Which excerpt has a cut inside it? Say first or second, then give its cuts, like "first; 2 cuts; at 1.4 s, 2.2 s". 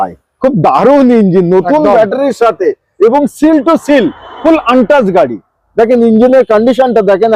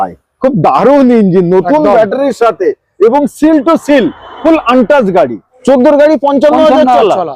second; 1 cut; at 5.5 s